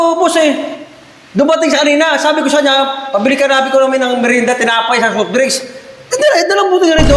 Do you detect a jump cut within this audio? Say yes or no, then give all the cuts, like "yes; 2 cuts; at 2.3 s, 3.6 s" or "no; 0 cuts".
no; 0 cuts